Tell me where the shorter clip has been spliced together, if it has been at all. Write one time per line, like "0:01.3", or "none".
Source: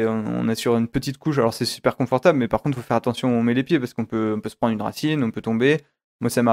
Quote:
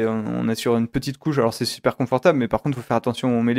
none

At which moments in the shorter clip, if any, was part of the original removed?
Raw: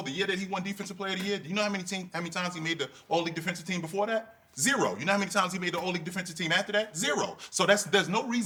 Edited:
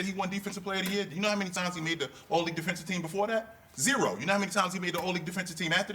0:01.5

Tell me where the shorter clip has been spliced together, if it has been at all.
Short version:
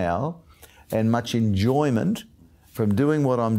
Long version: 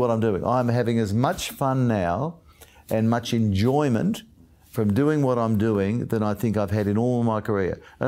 none

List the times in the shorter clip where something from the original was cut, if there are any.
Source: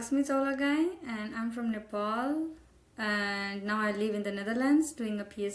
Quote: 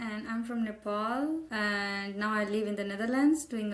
0:01.5

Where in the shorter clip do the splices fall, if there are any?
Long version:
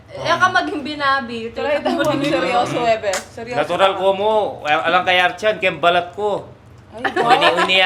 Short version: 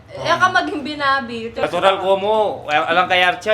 0:01.6

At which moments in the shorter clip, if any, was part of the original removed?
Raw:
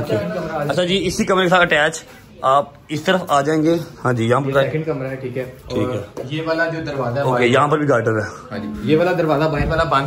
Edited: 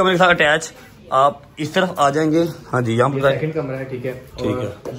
none

